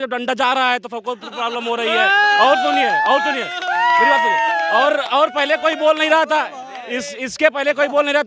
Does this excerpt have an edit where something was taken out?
no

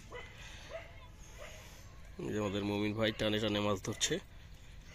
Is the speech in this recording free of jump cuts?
yes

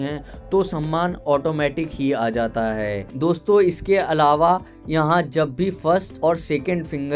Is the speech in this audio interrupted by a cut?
yes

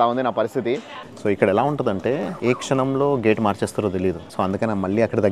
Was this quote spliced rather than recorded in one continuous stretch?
yes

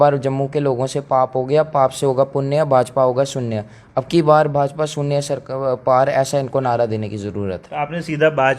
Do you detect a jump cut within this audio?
no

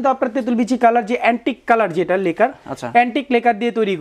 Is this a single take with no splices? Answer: yes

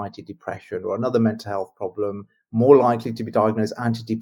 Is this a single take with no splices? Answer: yes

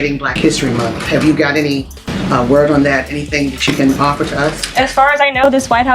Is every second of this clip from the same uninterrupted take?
yes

